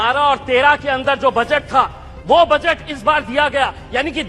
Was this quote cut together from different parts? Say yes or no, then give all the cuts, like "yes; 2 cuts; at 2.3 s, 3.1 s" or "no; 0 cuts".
no; 0 cuts